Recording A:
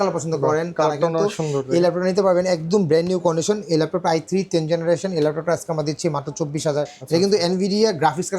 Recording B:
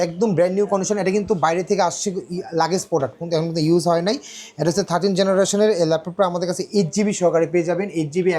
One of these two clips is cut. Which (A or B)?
A